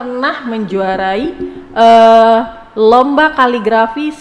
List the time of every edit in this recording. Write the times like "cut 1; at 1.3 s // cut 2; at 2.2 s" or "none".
none